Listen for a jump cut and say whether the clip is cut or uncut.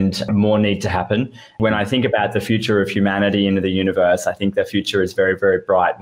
cut